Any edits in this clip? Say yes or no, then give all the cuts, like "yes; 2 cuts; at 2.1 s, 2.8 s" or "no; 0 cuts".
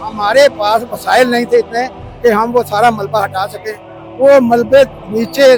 no; 0 cuts